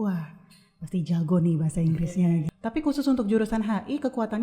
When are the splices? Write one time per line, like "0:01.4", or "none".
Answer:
0:02.5